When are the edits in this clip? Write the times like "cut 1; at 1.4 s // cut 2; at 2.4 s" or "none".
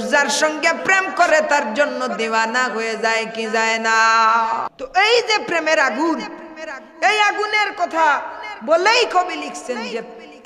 cut 1; at 4.8 s